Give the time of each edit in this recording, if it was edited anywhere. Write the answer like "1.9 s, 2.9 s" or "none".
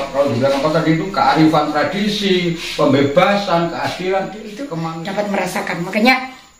4.6 s